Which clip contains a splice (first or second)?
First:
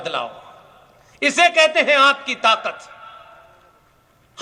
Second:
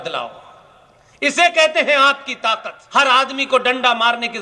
second